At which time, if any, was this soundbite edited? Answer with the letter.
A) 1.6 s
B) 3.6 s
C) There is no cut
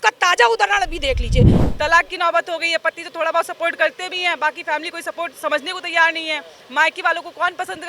A